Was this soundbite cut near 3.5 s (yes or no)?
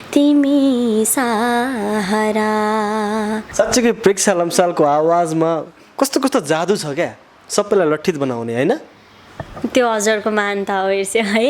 yes